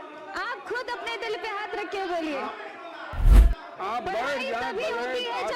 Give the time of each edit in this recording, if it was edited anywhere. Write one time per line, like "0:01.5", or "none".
0:03.3